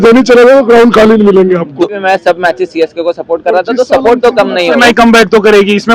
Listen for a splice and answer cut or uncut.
cut